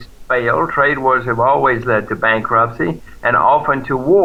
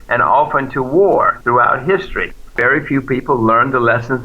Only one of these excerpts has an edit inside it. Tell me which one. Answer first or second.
second